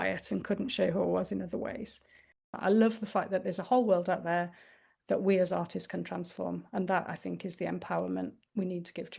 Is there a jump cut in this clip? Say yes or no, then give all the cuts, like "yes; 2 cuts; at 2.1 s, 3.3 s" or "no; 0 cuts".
yes; 1 cut; at 2.5 s